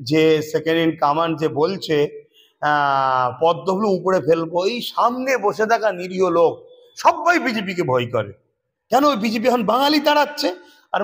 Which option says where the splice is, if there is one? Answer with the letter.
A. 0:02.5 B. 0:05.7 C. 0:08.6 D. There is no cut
D